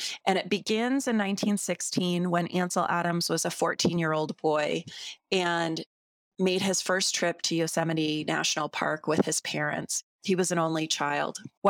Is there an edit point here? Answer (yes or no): no